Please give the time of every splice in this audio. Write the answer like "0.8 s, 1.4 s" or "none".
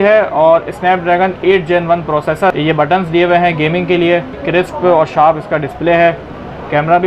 2.5 s, 4.4 s